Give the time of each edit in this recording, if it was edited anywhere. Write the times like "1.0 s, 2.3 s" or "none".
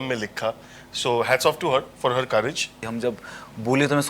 2.8 s